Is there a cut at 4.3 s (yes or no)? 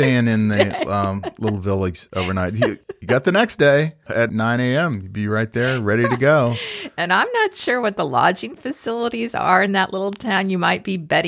yes